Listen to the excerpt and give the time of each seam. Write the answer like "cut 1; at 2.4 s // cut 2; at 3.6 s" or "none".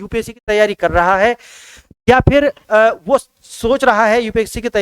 none